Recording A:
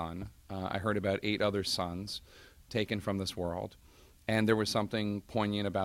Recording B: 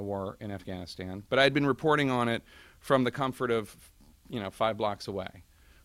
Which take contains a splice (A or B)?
A